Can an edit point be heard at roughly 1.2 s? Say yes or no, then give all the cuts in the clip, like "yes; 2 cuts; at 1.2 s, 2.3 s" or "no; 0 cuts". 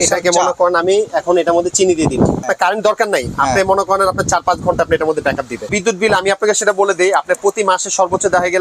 no; 2 cuts; at 2.5 s, 5.7 s